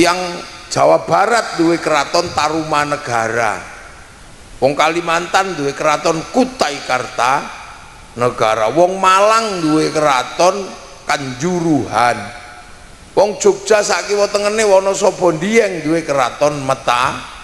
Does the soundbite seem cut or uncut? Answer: uncut